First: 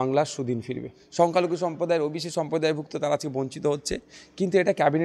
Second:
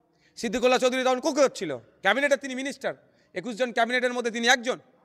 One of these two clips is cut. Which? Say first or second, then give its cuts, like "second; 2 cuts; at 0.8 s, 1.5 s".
first; 1 cut; at 1.0 s